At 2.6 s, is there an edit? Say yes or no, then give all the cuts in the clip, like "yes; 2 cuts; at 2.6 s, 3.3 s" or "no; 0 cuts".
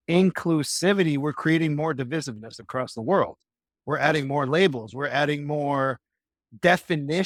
no; 0 cuts